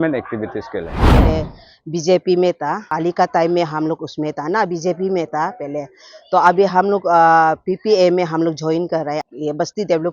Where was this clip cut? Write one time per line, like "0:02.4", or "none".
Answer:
0:01.1
0:02.9
0:09.2